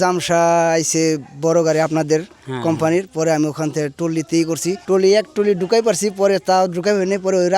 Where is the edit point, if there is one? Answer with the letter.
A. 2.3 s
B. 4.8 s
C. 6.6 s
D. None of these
B